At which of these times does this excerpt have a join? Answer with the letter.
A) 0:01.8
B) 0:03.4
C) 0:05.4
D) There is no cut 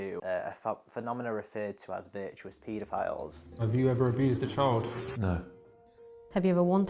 B